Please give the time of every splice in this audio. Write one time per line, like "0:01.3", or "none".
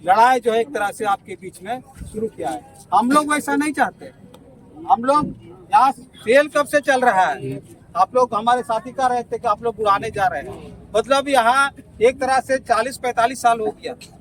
none